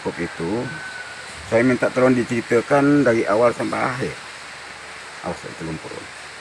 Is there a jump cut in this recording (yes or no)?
no